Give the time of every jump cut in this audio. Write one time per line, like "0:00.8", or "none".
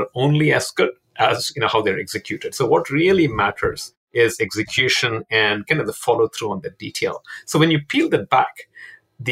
none